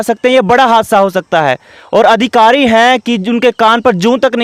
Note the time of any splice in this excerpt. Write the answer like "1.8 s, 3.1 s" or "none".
none